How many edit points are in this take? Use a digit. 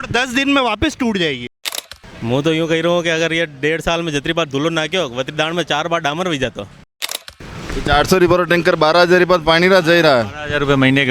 2